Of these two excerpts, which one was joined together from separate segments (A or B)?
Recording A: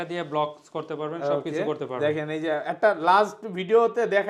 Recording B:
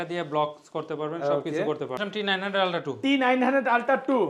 B